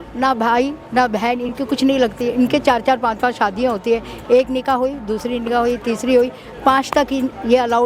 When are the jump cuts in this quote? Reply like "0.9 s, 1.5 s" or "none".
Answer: none